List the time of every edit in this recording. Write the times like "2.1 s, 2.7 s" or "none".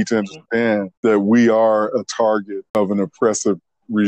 0.9 s, 2.8 s